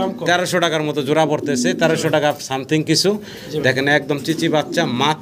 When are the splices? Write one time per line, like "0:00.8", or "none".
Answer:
none

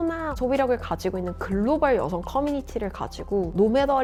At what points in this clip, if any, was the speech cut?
none

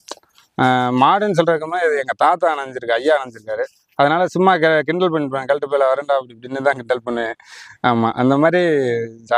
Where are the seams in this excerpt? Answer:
none

